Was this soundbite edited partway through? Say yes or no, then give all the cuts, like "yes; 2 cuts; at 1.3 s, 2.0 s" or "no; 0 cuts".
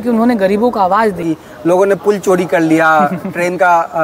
yes; 1 cut; at 1.2 s